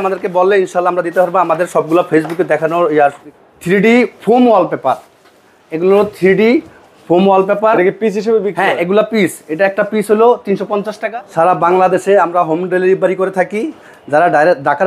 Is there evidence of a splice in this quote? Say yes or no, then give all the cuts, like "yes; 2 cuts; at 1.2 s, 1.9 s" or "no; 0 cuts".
yes; 2 cuts; at 3.2 s, 11.0 s